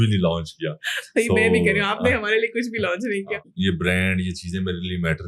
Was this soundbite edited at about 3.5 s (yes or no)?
yes